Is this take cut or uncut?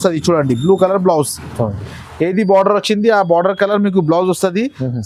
uncut